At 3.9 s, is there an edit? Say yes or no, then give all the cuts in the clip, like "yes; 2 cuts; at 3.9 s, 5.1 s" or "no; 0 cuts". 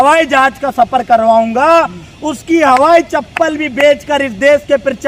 no; 0 cuts